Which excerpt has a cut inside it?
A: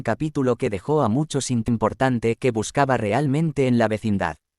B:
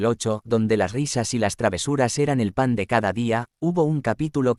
A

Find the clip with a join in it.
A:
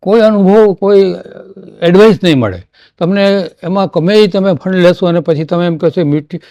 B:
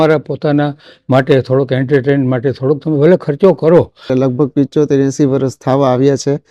B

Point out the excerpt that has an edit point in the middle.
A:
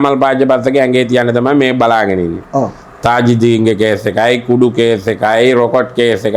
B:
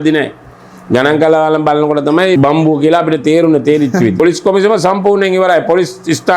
B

